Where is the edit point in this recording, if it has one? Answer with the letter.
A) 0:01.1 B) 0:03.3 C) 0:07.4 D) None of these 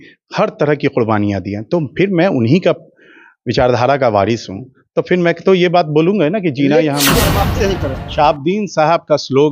C